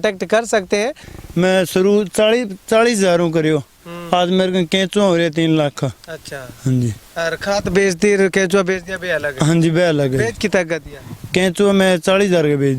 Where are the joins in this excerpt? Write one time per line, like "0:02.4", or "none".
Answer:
0:01.1